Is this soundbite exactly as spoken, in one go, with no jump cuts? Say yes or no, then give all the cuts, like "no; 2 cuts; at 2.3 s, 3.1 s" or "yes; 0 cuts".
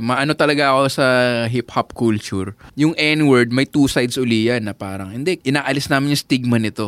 no; 2 cuts; at 2.6 s, 5.4 s